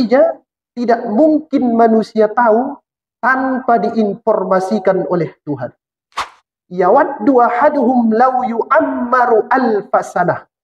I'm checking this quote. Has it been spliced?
yes; 1 cut; at 6.3 s

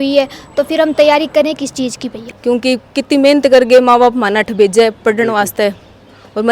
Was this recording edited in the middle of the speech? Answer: yes; 1 cut; at 2.2 s

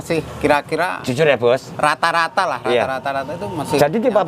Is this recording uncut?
yes; 0 cuts

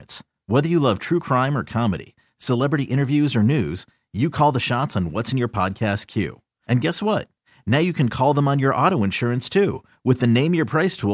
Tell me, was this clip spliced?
no; 0 cuts

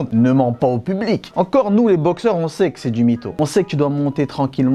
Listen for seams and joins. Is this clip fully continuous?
yes; 0 cuts

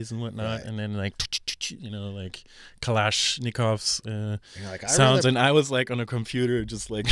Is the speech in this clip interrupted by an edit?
no; 0 cuts

